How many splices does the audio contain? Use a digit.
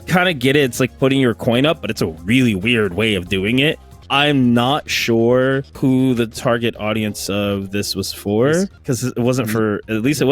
3